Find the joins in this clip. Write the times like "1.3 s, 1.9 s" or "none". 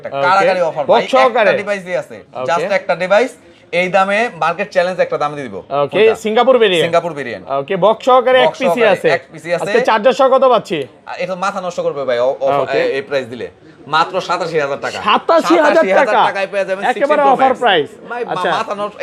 none